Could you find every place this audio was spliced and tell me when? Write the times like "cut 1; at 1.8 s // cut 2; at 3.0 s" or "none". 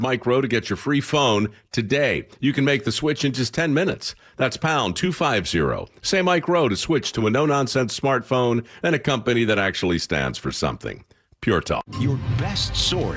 cut 1; at 11.8 s